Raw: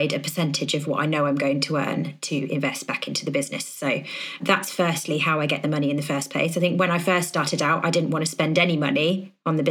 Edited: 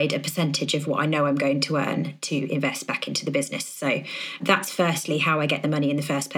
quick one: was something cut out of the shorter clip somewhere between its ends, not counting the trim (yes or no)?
no